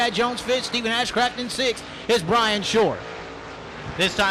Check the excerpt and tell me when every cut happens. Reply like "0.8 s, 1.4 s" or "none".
3.4 s